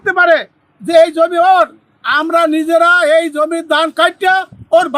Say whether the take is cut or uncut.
uncut